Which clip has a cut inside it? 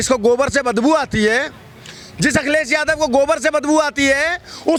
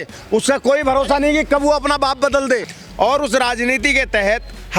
second; 1 cut; at 2.7 s

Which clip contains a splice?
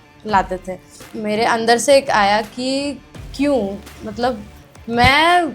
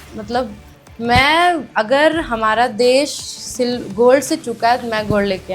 first; 1 cut; at 1.1 s

